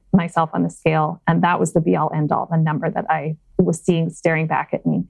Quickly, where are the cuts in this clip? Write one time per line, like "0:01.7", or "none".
0:03.4